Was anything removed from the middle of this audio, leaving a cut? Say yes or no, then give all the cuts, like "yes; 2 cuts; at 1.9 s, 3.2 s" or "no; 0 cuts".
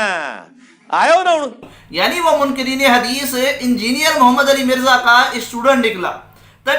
yes; 1 cut; at 1.6 s